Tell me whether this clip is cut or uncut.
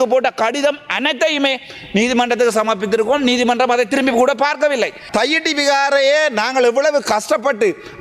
cut